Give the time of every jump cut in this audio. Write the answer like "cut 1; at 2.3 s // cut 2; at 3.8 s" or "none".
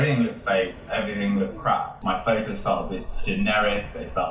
cut 1; at 1.9 s